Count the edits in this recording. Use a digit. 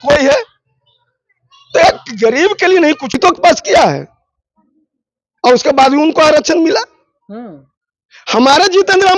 1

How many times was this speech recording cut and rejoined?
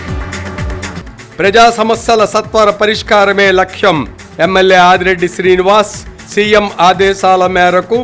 1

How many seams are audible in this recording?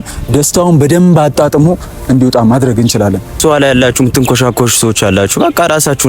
1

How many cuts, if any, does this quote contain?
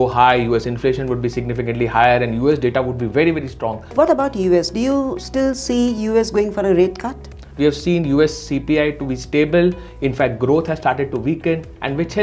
2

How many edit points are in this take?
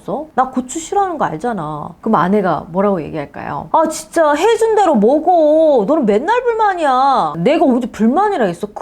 2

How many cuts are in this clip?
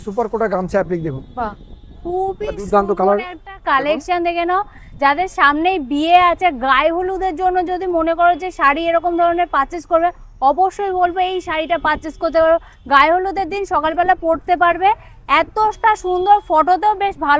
0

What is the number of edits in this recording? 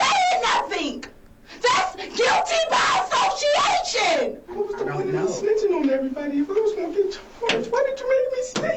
1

